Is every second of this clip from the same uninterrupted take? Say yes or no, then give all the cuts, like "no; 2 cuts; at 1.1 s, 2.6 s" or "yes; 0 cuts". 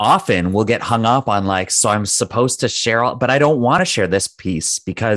no; 1 cut; at 3.8 s